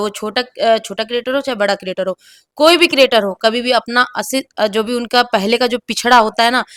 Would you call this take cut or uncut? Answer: uncut